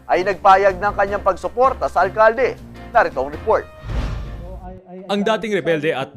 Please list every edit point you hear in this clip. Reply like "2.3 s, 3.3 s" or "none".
4.8 s